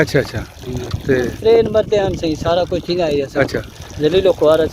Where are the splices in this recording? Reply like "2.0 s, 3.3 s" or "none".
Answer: 1.3 s